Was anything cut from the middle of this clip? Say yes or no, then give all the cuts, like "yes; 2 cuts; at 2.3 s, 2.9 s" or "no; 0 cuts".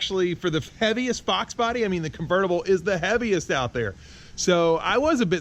no; 0 cuts